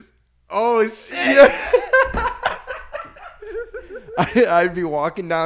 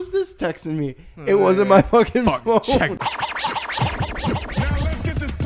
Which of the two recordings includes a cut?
second; 1 cut; at 3.0 s

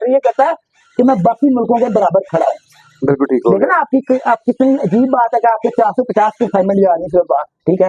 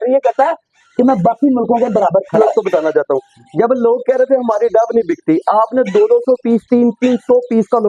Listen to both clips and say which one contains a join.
second; 1 cut; at 2.4 s

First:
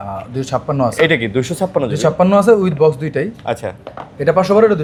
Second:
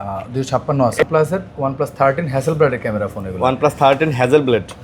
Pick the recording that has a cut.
second; 1 cut; at 1.0 s

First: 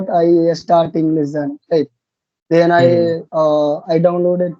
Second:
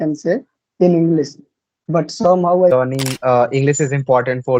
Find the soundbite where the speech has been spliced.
second; 1 cut; at 2.7 s

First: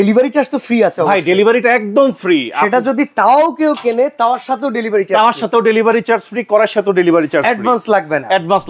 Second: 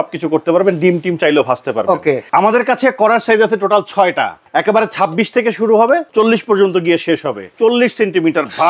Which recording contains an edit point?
second; 4 cuts; at 2.2 s, 4.4 s, 6.1 s, 7.5 s

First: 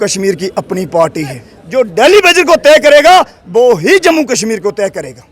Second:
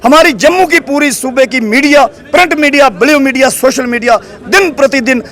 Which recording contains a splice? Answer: first; 1 cut; at 1.5 s

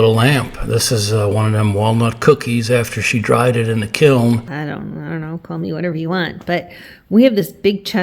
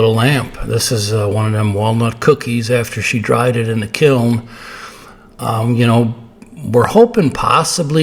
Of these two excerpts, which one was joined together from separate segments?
first; 1 cut; at 4.5 s

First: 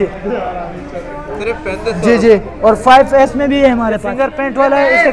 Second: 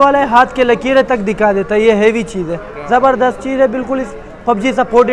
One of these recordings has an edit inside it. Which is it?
first; 1 cut; at 4.0 s

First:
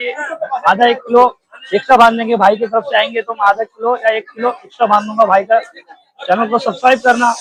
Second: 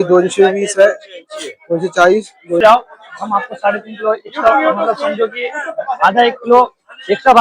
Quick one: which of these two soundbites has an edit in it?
second; 1 cut; at 2.6 s

